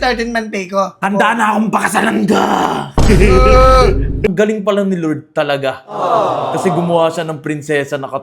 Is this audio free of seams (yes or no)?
no